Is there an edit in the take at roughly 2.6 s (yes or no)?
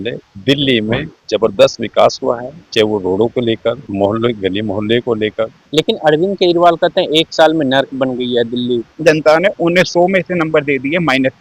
no